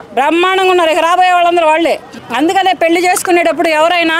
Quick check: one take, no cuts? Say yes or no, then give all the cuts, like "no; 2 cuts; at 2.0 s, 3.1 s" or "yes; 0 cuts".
no; 1 cut; at 2.2 s